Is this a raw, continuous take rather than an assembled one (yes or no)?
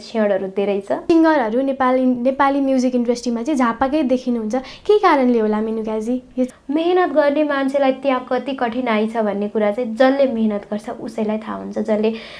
no